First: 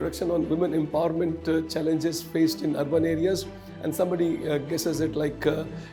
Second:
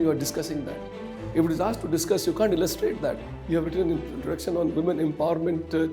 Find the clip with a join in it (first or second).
second